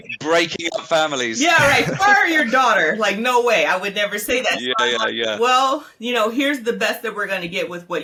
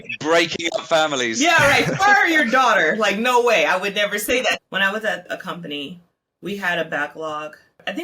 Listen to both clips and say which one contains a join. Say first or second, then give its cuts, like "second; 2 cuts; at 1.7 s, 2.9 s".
second; 1 cut; at 4.6 s